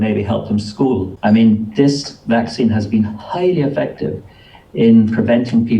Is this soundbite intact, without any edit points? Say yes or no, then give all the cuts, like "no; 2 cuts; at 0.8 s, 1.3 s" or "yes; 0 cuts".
no; 1 cut; at 1.1 s